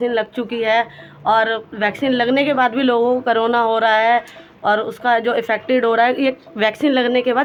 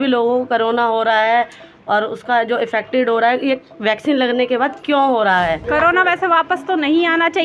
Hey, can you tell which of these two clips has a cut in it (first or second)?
second